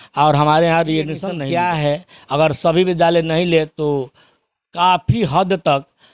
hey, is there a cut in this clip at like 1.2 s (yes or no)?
yes